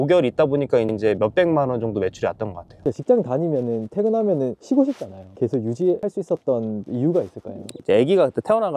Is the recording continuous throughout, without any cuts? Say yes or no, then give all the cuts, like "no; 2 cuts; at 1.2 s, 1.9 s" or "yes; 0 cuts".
no; 3 cuts; at 2.8 s, 4.6 s, 6.0 s